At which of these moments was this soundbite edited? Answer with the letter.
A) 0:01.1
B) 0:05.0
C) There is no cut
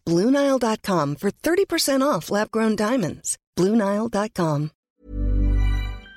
B